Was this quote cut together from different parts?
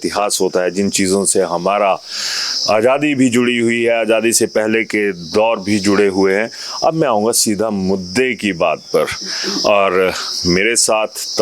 no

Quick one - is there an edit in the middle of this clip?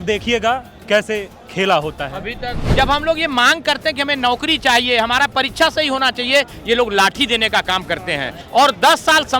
yes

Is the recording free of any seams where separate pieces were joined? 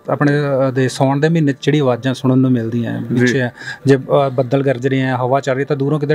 yes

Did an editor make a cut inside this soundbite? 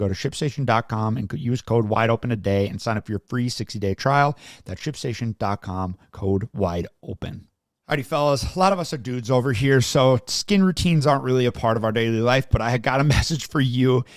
no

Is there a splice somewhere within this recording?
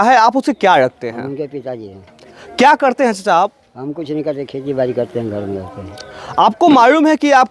no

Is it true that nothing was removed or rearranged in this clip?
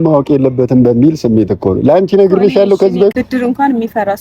no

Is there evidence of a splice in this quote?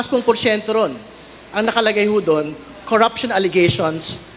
no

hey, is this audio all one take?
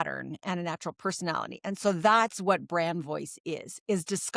yes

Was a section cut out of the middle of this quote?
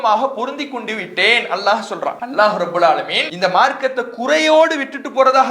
yes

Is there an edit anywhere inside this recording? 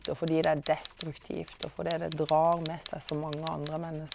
no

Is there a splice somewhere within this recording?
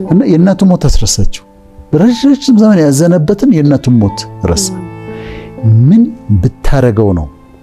no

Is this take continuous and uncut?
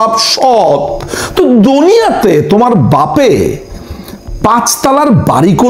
yes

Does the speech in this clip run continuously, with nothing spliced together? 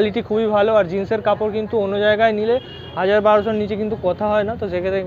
yes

